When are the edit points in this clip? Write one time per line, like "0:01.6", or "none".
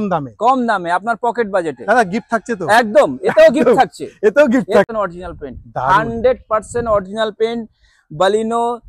0:04.8